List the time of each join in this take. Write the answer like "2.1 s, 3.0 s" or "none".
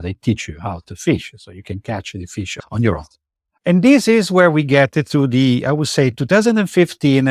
2.5 s

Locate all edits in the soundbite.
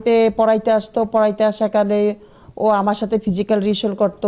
none

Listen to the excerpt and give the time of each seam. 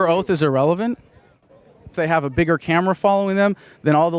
1.9 s

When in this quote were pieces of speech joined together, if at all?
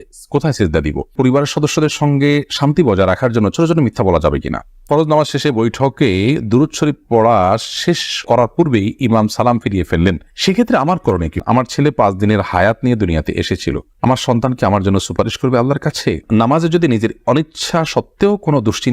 1.0 s, 4.8 s, 11.3 s, 16.2 s

